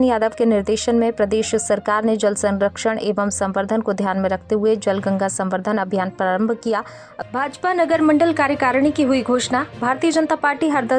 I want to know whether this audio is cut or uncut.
cut